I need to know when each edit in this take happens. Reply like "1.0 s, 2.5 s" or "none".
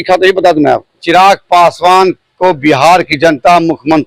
1.0 s